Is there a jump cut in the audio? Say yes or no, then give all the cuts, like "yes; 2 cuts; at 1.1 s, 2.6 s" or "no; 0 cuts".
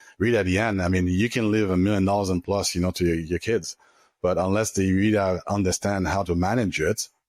no; 0 cuts